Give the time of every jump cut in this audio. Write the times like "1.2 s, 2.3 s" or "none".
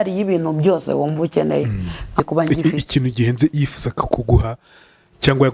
2.2 s